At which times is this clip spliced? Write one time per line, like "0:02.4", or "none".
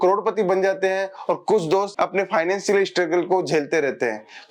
none